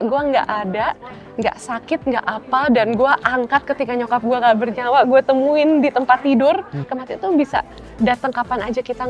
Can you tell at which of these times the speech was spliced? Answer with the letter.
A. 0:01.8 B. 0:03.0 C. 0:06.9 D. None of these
C